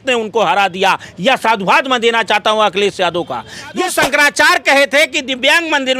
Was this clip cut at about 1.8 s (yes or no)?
no